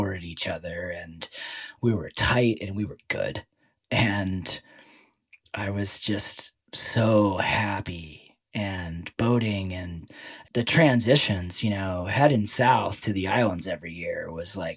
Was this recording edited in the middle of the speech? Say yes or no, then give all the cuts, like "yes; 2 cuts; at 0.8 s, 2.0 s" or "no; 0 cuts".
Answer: yes; 1 cut; at 10.5 s